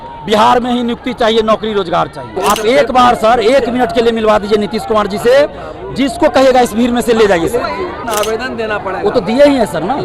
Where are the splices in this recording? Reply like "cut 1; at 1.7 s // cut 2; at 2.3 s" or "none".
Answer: cut 1; at 2.2 s // cut 2; at 8.0 s